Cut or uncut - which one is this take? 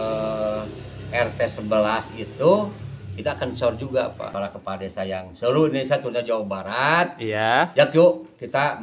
cut